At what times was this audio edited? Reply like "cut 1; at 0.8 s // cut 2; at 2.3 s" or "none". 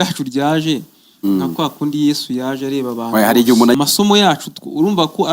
cut 1; at 3.8 s